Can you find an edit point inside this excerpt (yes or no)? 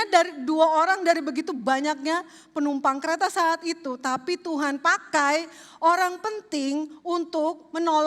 no